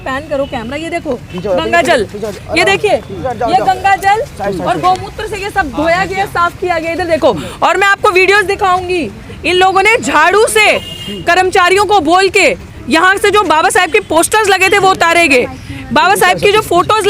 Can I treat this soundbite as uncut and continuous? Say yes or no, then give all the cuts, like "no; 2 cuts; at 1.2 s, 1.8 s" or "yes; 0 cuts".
yes; 0 cuts